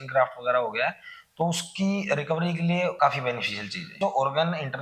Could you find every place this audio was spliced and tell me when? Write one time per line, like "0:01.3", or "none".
0:02.9
0:04.0

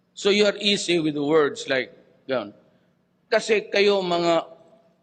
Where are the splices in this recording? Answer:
none

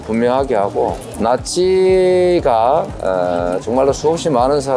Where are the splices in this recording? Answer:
0:01.1

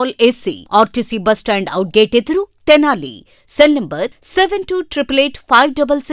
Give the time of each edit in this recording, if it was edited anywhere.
none

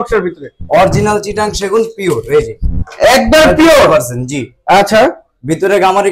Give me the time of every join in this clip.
none

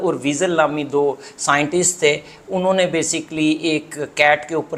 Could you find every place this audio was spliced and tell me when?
none

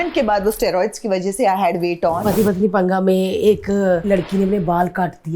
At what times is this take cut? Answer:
0:02.2
0:04.0

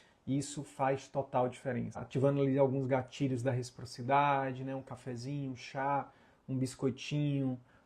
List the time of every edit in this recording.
0:02.0

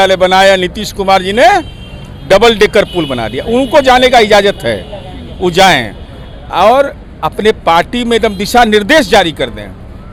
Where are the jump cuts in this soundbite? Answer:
none

